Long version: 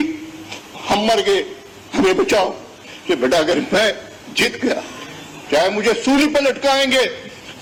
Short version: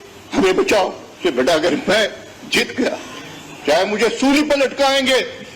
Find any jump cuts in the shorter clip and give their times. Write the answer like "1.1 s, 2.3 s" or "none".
1.0 s